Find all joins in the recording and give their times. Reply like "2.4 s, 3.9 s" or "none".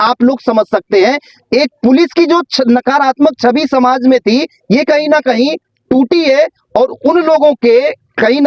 none